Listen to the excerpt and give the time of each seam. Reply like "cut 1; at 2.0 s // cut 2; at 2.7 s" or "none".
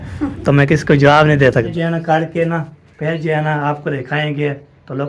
cut 1; at 1.7 s